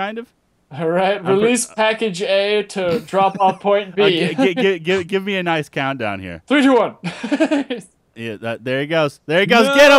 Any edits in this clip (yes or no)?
yes